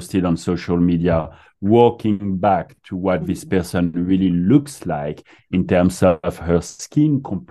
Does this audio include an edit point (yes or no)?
no